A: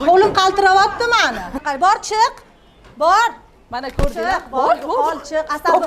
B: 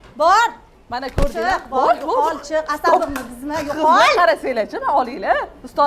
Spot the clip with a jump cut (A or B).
A